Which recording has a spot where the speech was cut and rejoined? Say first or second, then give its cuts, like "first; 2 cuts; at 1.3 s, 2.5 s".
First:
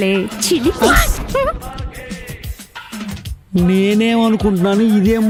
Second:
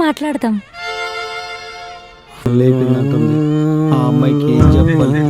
second; 1 cut; at 2.5 s